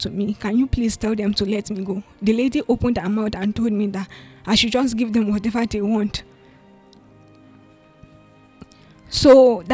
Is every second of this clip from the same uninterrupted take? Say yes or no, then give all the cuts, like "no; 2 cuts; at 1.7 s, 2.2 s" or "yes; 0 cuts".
yes; 0 cuts